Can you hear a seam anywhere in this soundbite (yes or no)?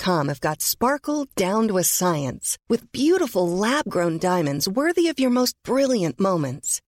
no